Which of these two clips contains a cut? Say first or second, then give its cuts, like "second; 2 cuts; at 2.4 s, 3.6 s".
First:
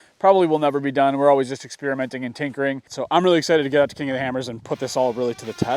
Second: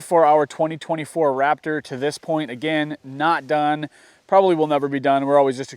first; 1 cut; at 2.9 s